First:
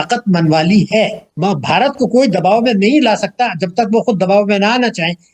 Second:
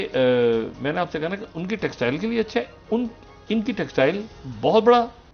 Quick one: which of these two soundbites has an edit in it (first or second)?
first